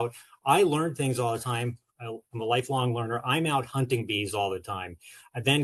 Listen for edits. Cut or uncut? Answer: uncut